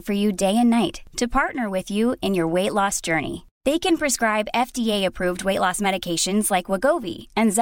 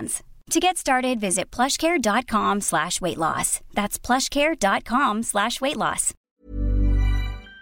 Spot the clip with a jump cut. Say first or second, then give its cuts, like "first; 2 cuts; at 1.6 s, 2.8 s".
second; 1 cut; at 6.3 s